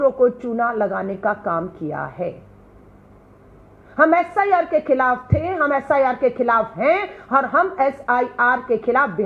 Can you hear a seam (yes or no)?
no